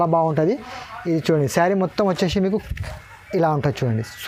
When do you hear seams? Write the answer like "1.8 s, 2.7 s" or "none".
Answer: none

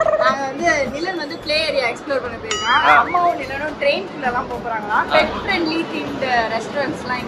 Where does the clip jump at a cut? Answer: none

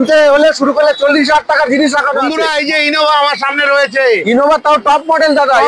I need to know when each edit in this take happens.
2.3 s

